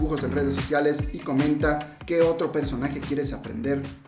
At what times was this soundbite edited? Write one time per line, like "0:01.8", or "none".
none